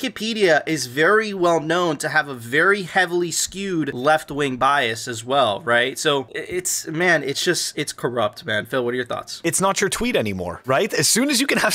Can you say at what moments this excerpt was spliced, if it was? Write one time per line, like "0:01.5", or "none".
none